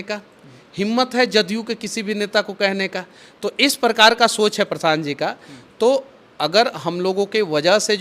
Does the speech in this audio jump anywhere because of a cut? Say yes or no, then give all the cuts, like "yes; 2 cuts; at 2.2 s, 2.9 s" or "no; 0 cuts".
no; 0 cuts